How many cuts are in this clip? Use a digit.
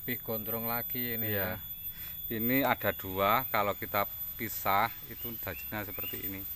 0